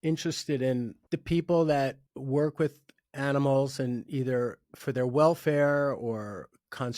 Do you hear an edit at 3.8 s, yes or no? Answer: no